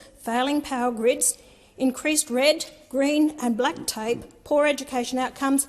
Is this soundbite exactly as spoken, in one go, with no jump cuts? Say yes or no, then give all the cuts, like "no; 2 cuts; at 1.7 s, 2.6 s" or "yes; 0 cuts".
yes; 0 cuts